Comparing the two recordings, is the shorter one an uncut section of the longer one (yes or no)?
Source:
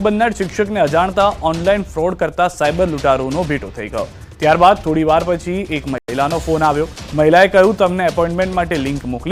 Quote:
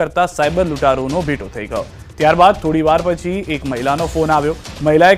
no